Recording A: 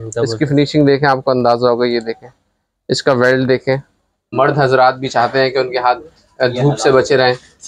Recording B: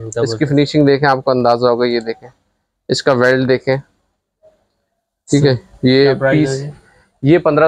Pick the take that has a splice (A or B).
A